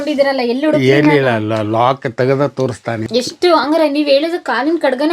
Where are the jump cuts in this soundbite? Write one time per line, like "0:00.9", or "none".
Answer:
0:03.0